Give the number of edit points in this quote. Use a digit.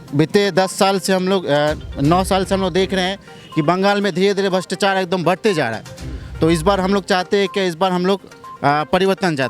0